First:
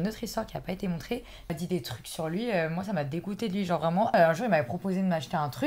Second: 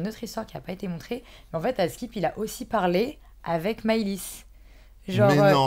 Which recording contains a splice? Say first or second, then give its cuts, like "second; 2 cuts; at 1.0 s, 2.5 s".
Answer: first; 2 cuts; at 1.5 s, 4.1 s